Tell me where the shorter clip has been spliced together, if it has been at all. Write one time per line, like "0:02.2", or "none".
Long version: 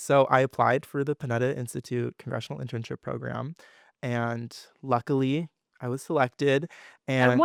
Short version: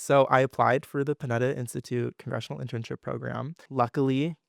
0:03.6